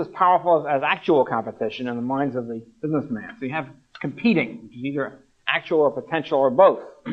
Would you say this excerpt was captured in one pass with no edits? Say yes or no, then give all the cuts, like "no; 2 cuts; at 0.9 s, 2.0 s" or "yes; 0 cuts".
no; 1 cut; at 5.7 s